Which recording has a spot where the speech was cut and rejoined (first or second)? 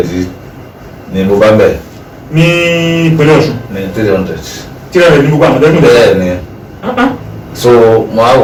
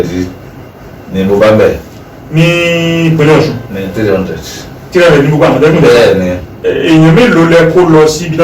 second